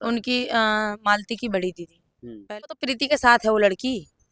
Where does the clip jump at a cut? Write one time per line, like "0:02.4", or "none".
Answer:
0:02.7